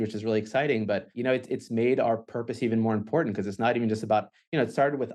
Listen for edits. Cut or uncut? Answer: cut